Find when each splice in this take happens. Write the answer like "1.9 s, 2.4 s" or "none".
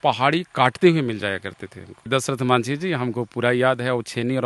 none